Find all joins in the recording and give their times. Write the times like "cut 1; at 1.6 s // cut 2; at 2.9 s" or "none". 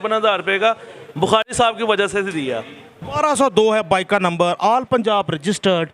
cut 1; at 3.2 s

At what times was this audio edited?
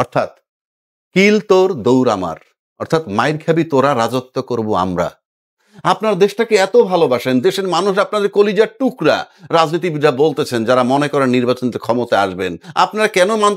cut 1; at 5.6 s // cut 2; at 12.6 s

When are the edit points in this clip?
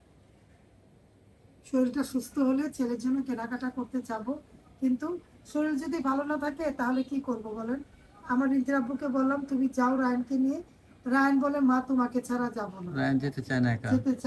none

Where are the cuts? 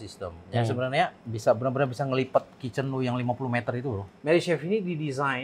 cut 1; at 1.3 s // cut 2; at 4.1 s

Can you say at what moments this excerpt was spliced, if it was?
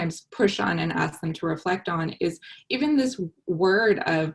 none

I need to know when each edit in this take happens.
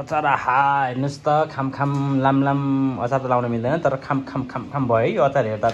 none

